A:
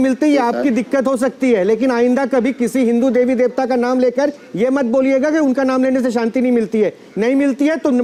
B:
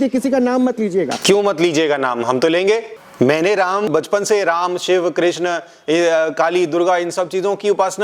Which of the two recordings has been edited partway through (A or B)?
B